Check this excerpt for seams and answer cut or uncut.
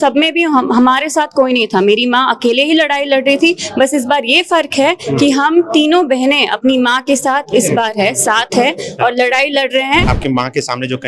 cut